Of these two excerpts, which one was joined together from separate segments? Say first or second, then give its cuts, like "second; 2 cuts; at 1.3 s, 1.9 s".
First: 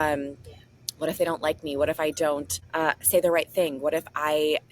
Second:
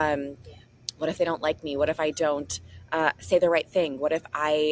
first; 1 cut; at 2.6 s